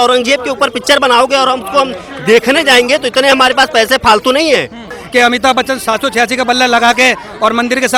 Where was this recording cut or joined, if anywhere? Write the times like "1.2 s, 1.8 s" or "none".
5.0 s

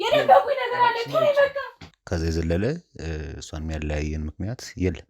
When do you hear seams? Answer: 1.7 s

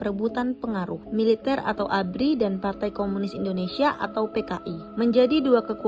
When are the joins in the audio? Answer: 1.0 s

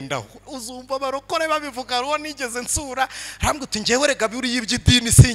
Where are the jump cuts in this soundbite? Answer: none

